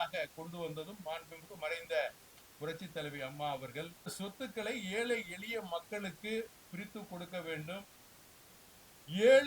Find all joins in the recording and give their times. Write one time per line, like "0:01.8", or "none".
0:04.1